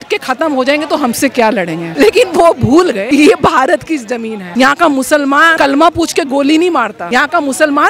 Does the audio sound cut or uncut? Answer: cut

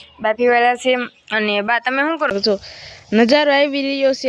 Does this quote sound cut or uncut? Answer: cut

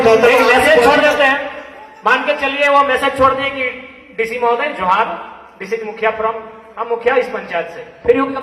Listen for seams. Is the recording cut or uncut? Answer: uncut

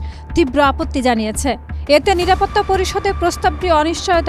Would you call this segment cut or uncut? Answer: uncut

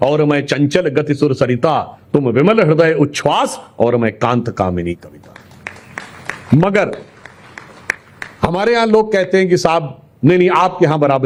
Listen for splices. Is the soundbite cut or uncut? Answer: uncut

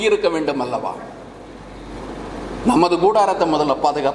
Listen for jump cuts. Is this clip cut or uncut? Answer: cut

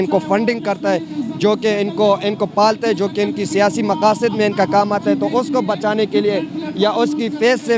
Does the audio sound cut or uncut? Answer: uncut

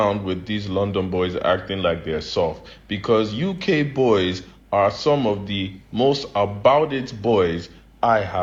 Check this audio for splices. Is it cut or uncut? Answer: uncut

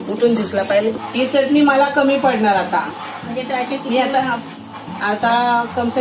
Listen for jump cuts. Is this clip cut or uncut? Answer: cut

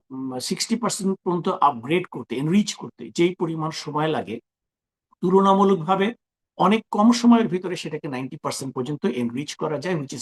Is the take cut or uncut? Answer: uncut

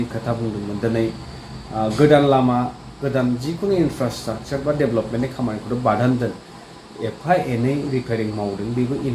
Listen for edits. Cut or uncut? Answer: uncut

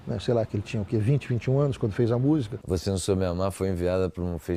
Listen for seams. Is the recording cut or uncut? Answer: cut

